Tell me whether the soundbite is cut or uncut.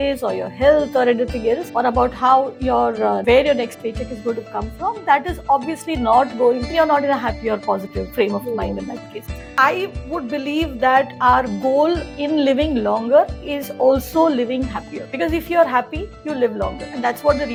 uncut